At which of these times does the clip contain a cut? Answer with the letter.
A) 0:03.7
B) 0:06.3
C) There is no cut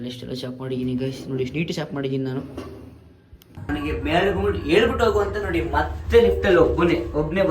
A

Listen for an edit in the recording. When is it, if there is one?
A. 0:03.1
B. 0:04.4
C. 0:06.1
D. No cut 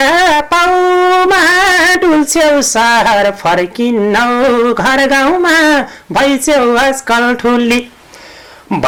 D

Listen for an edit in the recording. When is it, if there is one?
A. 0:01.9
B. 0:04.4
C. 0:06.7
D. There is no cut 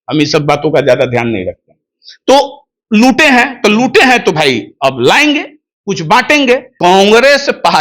C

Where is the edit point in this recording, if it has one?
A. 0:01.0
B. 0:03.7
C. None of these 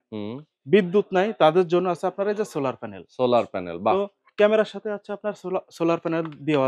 C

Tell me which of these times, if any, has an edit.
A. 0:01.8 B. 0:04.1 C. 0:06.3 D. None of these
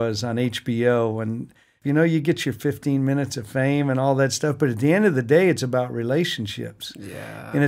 A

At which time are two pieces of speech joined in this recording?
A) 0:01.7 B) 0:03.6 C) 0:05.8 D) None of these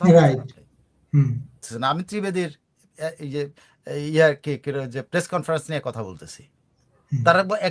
A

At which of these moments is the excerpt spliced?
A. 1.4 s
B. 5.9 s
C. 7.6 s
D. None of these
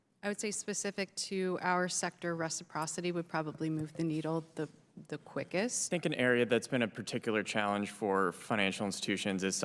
B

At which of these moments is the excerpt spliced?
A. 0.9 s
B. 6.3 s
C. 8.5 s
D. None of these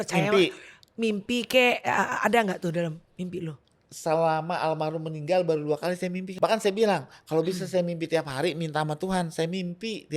B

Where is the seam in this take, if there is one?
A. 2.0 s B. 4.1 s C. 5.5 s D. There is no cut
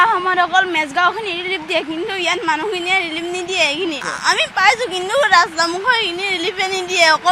B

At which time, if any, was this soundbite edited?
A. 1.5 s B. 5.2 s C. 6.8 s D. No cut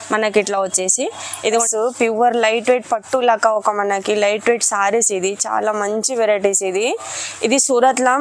A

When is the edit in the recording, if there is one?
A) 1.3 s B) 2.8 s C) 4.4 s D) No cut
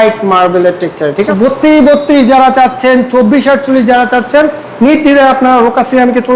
A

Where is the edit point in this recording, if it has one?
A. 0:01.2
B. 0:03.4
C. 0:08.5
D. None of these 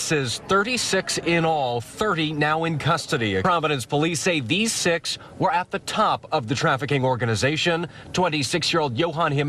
B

